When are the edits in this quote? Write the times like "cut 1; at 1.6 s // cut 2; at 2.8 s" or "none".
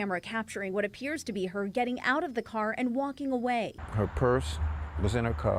none